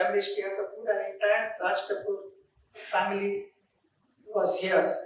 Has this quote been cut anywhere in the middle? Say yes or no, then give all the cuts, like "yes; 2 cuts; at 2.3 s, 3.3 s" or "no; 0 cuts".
no; 0 cuts